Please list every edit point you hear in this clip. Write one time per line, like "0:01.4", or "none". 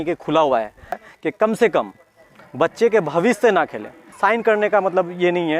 0:01.1
0:04.1